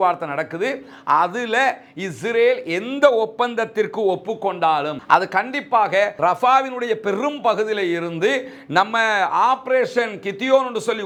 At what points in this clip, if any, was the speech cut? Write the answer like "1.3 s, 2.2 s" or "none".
none